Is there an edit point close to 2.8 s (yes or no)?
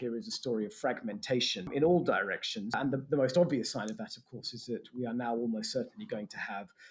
yes